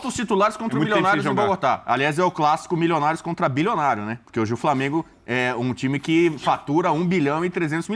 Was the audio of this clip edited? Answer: no; 0 cuts

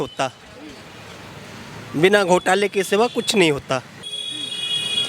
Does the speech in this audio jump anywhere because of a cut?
yes; 1 cut; at 4.1 s

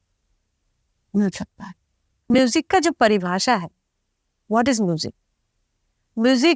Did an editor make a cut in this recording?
yes; 1 cut; at 2.4 s

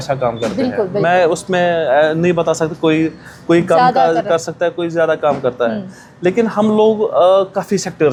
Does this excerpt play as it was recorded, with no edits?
yes; 0 cuts

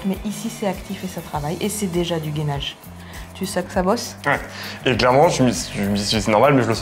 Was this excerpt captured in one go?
yes; 0 cuts

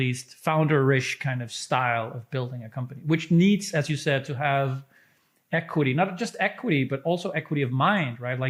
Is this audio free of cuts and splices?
yes; 0 cuts

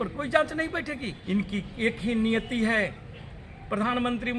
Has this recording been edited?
yes; 1 cut; at 1.1 s

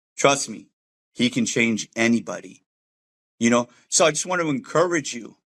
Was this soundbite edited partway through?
no; 0 cuts

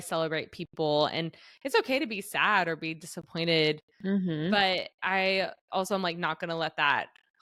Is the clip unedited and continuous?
yes; 0 cuts

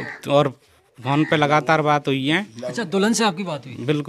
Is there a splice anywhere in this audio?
no; 0 cuts

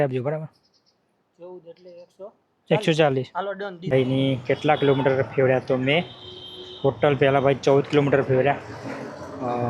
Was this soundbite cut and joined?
yes; 1 cut; at 3.9 s

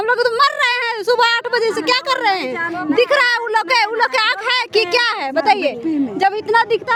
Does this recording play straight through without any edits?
yes; 0 cuts

